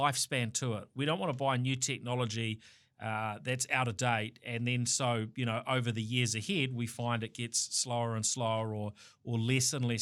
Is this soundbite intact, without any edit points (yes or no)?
yes